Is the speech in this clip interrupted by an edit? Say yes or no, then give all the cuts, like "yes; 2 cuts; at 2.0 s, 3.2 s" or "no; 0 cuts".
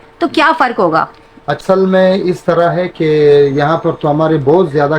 no; 0 cuts